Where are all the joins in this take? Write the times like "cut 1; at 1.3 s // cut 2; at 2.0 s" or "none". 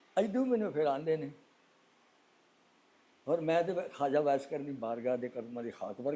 none